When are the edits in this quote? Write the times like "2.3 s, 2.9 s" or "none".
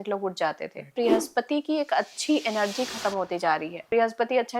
0.9 s, 3.9 s